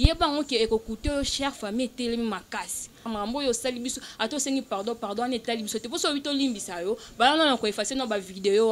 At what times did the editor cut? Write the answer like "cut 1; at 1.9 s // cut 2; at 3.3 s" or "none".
cut 1; at 3.0 s

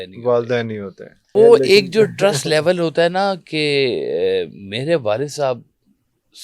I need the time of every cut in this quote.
cut 1; at 1.3 s

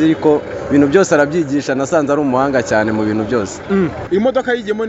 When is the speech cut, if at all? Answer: cut 1; at 4.0 s

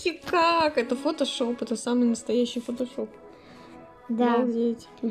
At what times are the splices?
none

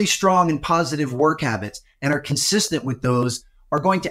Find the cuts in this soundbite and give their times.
none

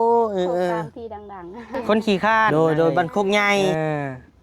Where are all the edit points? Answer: cut 1; at 1.8 s // cut 2; at 2.5 s // cut 3; at 3.7 s

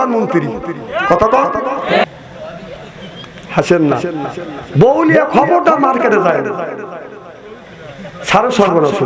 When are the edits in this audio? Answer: cut 1; at 2.0 s

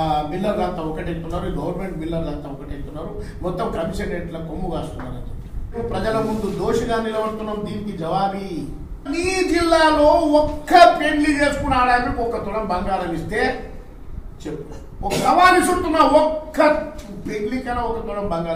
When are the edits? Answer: cut 1; at 5.8 s // cut 2; at 9.1 s // cut 3; at 15.2 s

